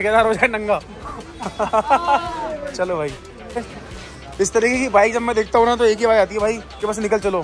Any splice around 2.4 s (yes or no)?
no